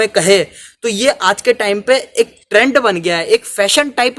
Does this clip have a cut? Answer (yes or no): no